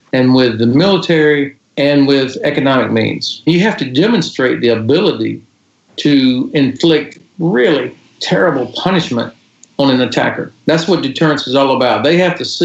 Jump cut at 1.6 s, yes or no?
no